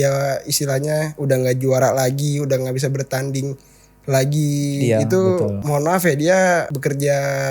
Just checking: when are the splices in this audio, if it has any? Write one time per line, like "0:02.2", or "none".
0:05.6
0:06.7